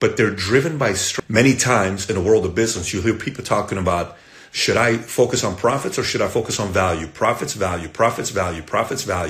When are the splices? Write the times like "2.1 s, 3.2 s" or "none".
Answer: 1.1 s